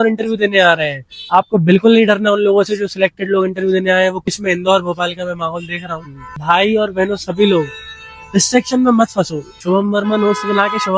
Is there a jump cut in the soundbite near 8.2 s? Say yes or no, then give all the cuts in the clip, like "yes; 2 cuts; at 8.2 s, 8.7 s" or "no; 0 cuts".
no; 3 cuts; at 4.3 s, 6.3 s, 9.6 s